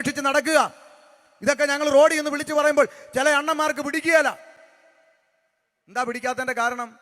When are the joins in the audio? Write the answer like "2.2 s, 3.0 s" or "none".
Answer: none